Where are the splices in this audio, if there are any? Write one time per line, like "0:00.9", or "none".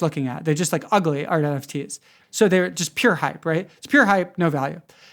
0:02.1